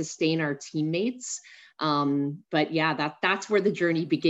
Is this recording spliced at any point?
no; 0 cuts

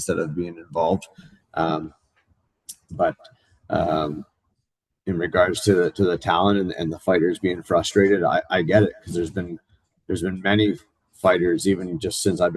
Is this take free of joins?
yes; 0 cuts

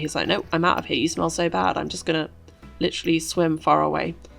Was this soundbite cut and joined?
no; 0 cuts

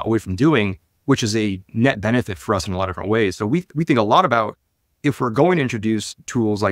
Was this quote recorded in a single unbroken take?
yes; 0 cuts

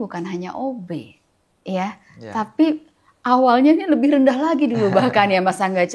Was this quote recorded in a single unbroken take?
yes; 0 cuts

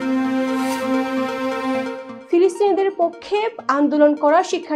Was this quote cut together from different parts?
yes; 1 cut; at 2.1 s

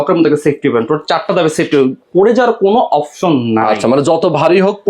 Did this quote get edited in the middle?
no; 0 cuts

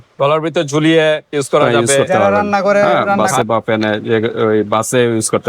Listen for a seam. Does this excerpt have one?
yes; 1 cut; at 3.3 s

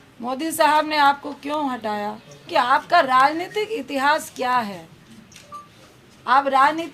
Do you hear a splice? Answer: yes; 1 cut; at 2.3 s

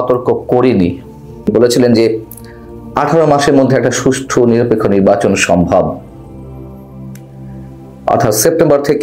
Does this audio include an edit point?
yes; 1 cut; at 1.5 s

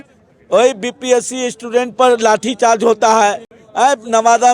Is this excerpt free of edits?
yes; 0 cuts

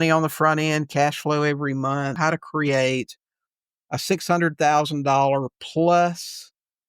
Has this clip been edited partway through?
yes; 1 cut; at 2.1 s

